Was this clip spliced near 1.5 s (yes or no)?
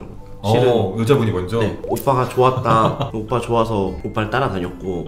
no